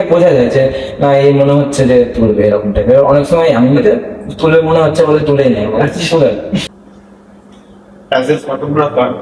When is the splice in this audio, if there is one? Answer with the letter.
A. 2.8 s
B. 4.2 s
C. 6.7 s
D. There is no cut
C